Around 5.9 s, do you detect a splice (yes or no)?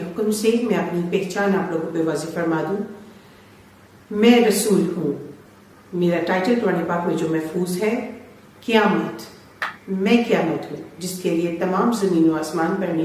no